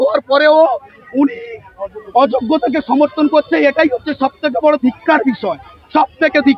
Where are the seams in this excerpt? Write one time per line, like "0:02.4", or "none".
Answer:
none

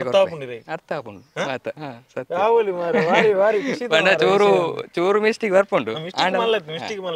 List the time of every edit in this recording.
none

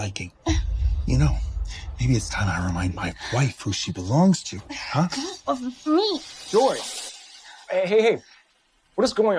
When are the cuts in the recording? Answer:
none

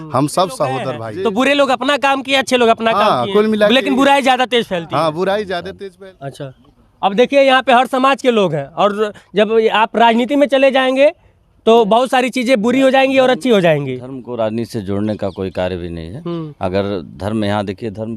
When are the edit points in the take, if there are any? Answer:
0:01.0
0:05.7

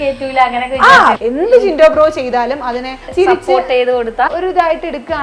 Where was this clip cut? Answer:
0:01.2
0:03.0
0:04.3

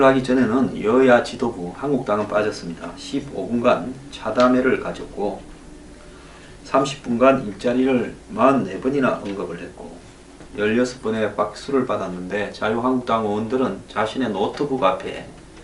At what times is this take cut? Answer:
0:13.8

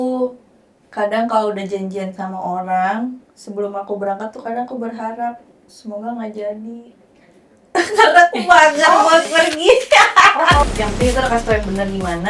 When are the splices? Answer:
0:10.6

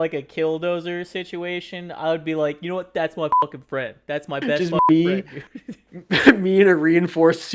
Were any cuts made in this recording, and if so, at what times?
none

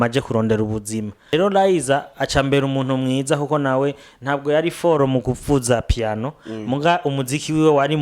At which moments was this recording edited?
0:01.3

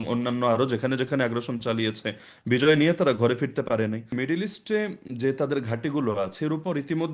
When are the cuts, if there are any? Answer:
0:04.1

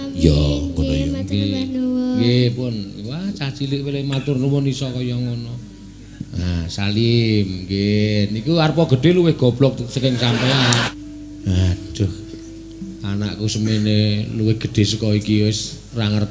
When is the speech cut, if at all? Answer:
0:10.9

